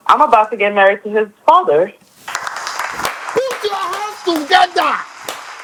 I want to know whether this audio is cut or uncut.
uncut